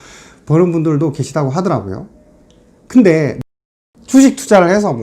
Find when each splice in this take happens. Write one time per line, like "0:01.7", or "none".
0:03.3